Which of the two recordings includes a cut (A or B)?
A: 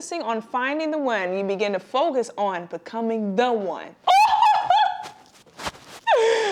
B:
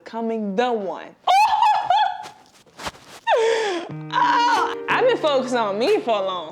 B